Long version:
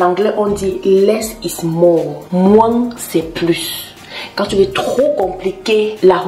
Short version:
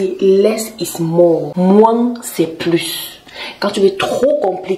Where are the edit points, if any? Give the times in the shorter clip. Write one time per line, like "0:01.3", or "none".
0:01.5